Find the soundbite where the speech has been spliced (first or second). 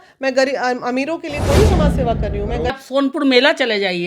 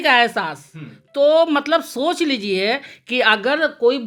first